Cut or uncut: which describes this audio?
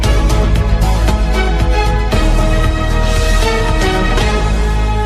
uncut